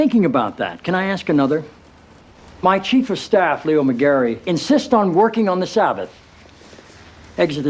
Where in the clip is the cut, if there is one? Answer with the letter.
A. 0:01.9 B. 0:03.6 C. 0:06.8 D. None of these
A